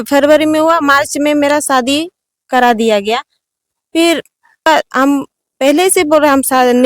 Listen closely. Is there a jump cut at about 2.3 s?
no; 1 cut; at 4.7 s

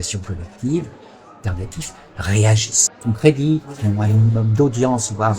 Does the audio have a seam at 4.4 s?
no; 2 cuts; at 1.5 s, 2.9 s

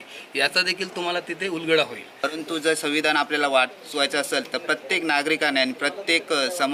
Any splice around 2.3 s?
yes; 1 cut; at 2.3 s

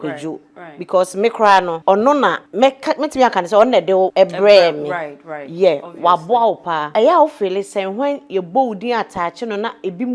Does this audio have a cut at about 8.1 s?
no; 4 cuts; at 1.8 s, 2.4 s, 4.1 s, 6.8 s

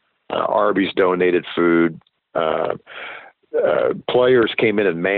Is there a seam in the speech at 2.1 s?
no; 0 cuts

